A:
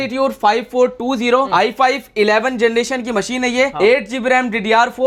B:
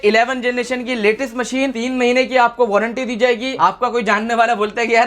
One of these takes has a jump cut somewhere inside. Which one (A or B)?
B